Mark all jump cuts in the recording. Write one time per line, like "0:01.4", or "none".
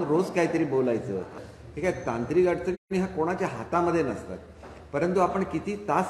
0:01.4